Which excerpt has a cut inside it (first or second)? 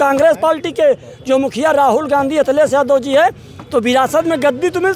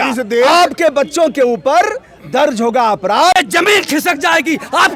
second